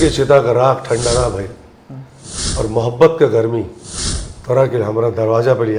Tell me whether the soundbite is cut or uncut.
uncut